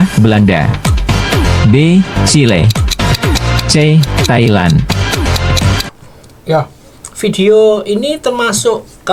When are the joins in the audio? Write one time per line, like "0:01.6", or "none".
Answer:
none